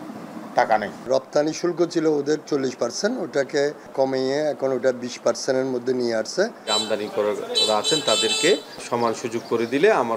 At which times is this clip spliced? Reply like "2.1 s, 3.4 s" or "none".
1.1 s, 3.9 s, 6.7 s, 8.8 s